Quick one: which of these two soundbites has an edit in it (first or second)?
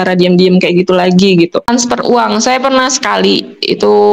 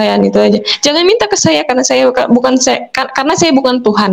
first